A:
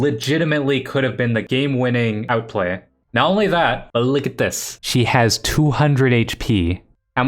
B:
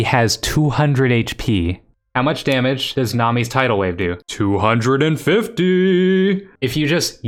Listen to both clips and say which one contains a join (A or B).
A